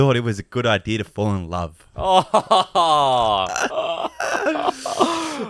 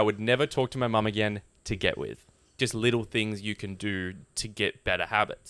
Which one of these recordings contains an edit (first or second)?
second